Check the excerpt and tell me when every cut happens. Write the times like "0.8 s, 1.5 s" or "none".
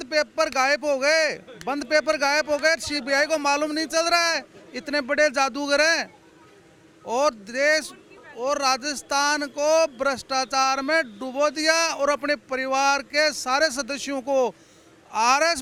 none